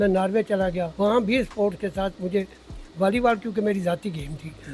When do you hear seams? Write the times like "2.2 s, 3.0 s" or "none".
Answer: 0.9 s